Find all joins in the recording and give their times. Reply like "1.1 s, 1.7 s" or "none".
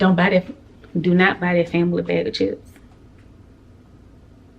none